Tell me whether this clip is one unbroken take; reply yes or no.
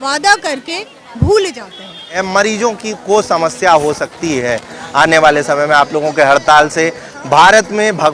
no